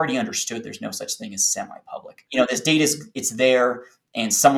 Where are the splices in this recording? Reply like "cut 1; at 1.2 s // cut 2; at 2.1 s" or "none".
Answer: cut 1; at 2.3 s